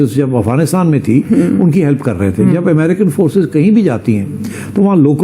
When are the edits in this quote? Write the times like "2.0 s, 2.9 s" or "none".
none